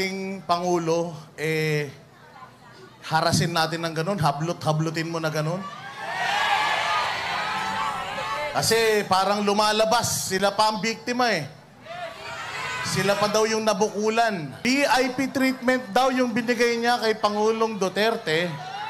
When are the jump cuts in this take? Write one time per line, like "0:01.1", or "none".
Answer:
0:08.5
0:14.5